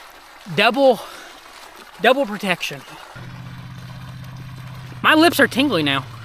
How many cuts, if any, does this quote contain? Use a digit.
1